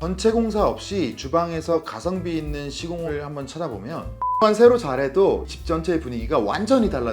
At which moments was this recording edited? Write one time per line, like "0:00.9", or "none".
0:04.4

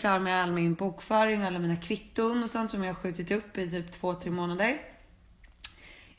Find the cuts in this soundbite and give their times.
none

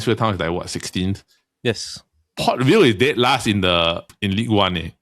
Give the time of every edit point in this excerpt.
0:04.1

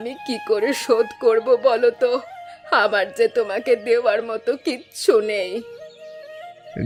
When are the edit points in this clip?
none

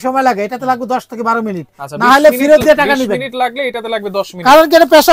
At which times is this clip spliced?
none

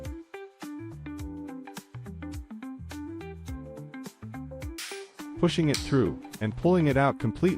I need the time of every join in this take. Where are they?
0:05.2

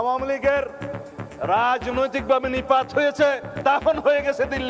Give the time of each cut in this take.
0:03.5

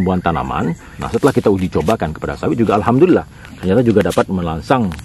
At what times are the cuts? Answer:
0:00.9

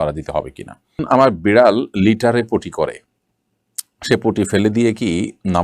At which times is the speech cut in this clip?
0:01.0

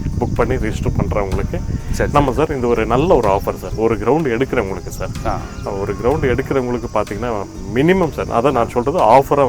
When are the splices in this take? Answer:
none

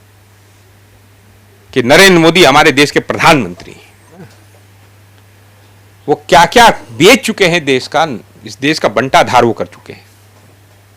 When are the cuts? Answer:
0:04.2

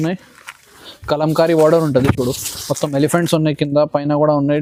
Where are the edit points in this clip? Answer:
none

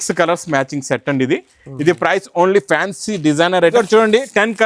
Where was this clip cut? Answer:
0:03.7

